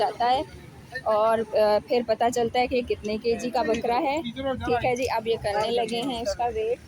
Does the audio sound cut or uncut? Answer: uncut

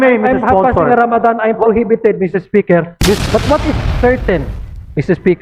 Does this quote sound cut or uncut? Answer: cut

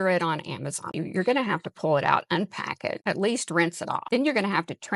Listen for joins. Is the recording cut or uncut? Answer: cut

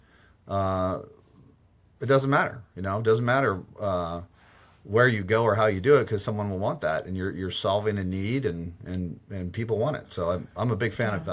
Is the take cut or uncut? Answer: uncut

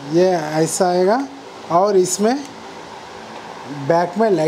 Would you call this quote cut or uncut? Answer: uncut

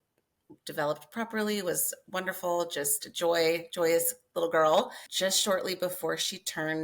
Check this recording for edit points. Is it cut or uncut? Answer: cut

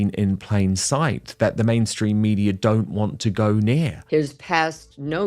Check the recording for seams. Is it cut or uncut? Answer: cut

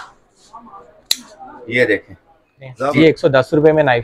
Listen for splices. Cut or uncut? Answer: cut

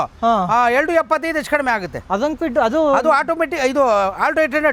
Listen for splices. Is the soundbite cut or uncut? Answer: uncut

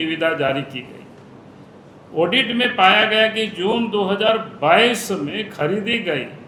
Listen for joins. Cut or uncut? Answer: uncut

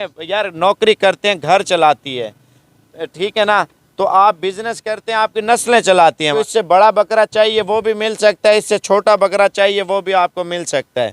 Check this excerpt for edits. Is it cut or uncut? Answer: cut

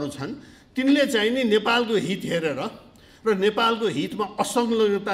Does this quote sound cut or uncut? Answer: uncut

